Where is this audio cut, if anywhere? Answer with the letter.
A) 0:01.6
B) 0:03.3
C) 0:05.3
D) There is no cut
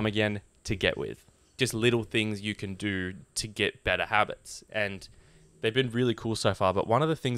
A